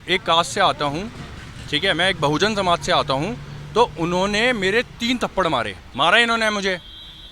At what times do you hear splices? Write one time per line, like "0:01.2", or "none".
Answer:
0:05.8